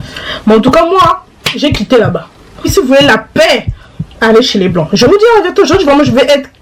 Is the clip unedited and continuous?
no; 1 cut; at 2.7 s

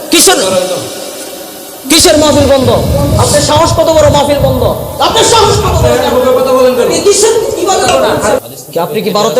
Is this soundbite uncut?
no; 1 cut; at 8.4 s

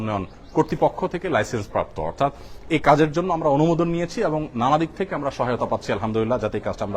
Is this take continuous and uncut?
yes; 0 cuts

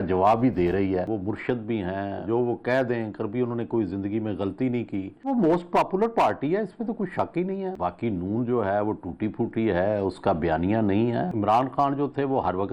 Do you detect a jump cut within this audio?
yes; 4 cuts; at 1.1 s, 5.2 s, 7.8 s, 11.3 s

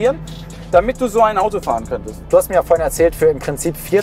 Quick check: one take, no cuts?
yes; 0 cuts

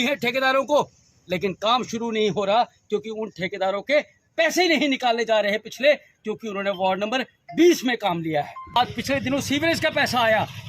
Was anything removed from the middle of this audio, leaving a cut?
yes; 1 cut; at 8.8 s

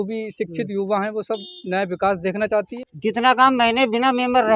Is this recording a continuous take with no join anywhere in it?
no; 1 cut; at 2.7 s

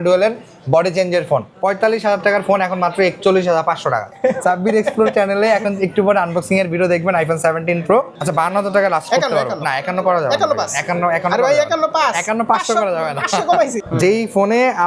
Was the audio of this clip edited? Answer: yes; 4 cuts; at 1.5 s, 4.1 s, 8.2 s, 13.8 s

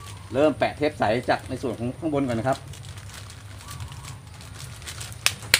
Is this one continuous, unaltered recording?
yes; 0 cuts

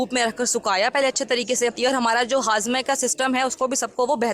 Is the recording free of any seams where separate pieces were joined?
no; 1 cut; at 1.8 s

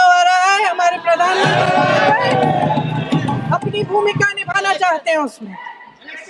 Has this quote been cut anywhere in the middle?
no; 0 cuts

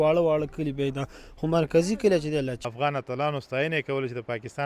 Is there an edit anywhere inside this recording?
yes; 1 cut; at 2.7 s

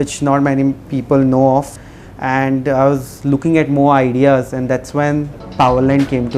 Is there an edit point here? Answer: yes; 2 cuts; at 1.8 s, 5.4 s

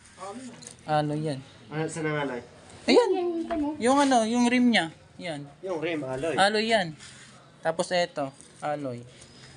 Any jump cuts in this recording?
no; 0 cuts

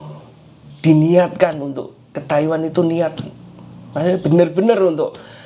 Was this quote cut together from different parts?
no; 0 cuts

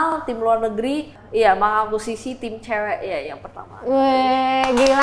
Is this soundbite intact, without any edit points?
no; 1 cut; at 1.2 s

